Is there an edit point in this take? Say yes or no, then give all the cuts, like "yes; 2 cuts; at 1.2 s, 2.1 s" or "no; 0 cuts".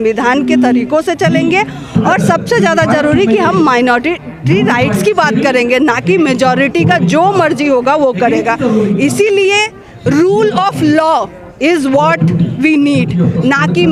no; 0 cuts